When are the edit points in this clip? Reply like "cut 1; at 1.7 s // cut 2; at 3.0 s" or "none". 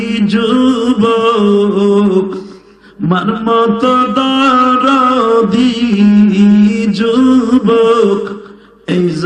none